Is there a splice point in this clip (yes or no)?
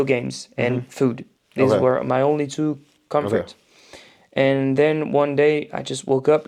no